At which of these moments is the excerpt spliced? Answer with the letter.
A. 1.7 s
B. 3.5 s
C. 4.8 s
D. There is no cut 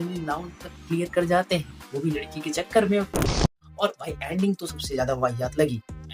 B